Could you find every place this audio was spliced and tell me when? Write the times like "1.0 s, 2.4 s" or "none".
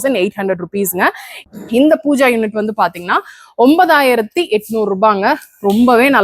1.5 s